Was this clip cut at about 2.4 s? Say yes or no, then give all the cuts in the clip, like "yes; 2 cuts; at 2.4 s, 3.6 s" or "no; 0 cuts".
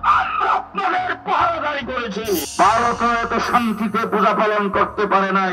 yes; 1 cut; at 2.4 s